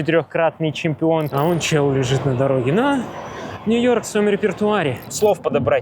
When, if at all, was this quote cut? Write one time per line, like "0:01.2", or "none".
0:01.3
0:05.0